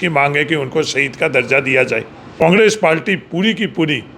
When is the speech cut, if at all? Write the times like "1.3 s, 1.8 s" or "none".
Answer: 2.4 s

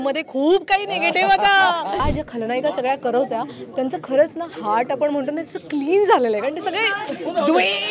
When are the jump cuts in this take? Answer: 2.0 s

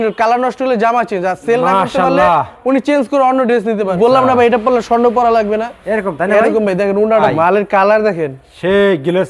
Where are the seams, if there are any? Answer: 3.9 s, 7.3 s

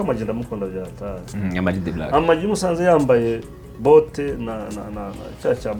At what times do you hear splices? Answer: none

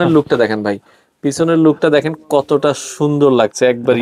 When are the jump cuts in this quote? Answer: none

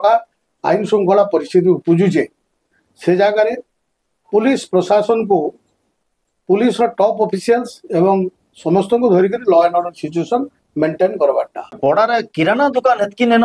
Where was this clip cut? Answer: 12.2 s

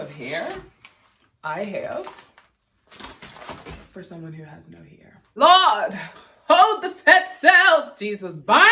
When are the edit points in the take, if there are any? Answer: 5.3 s

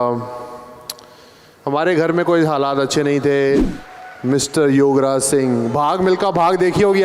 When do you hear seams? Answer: 3.7 s

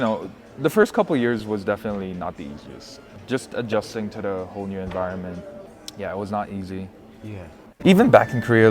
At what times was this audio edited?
7.7 s

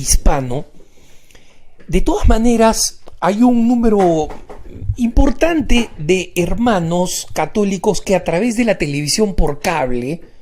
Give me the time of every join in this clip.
none

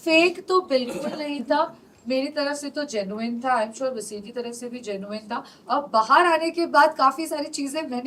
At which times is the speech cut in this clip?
none

